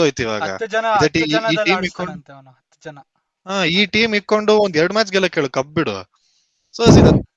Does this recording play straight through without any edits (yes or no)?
yes